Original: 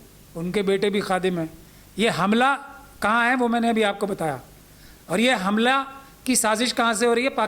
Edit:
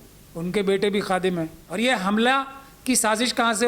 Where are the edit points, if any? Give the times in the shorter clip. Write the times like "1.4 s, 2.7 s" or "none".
1.6 s